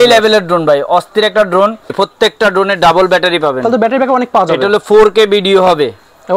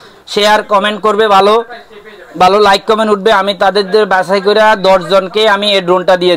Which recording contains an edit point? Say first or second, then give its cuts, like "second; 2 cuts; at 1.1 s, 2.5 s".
first; 1 cut; at 1.9 s